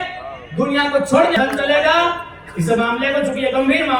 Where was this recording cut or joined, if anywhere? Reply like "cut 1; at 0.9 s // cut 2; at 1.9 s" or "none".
cut 1; at 1.4 s

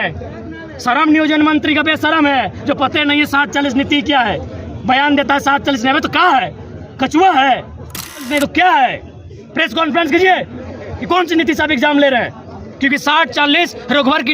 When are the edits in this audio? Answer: cut 1; at 8.3 s

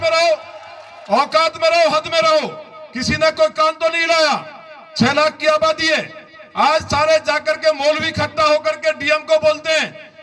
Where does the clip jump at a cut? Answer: none

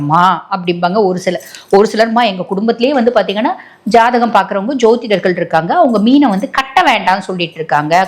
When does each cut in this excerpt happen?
none

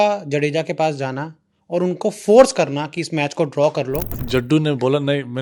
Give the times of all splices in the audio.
cut 1; at 4.1 s

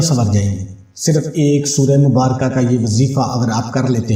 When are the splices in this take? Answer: none

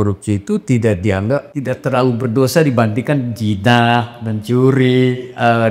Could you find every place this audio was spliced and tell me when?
cut 1; at 1.5 s

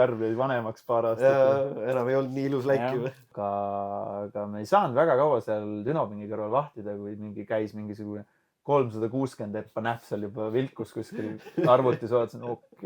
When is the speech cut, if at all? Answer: cut 1; at 3.3 s

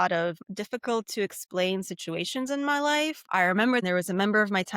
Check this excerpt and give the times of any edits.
cut 1; at 3.4 s

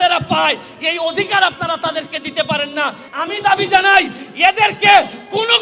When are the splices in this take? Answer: cut 1; at 3.1 s

